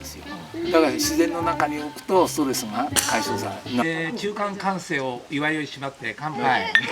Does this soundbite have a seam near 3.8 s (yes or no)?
yes